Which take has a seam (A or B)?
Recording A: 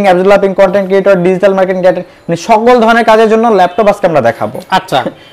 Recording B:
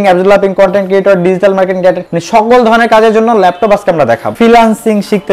B